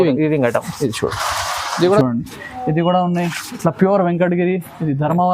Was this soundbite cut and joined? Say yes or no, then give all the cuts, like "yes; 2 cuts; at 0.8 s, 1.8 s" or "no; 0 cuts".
yes; 1 cut; at 2.0 s